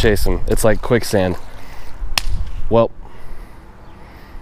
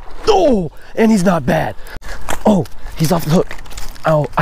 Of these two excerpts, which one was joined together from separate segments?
second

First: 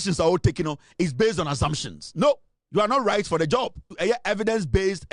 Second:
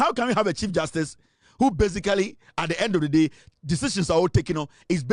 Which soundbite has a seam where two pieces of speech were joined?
first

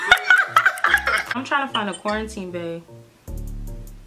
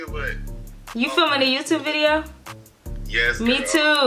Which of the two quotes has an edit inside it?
first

